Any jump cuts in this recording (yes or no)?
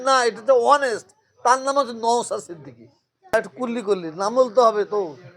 yes